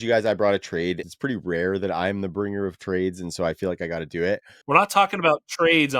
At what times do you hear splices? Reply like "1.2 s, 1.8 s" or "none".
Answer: 1.0 s

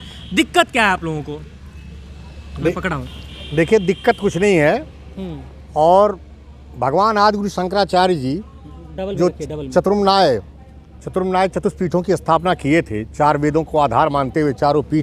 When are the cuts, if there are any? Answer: none

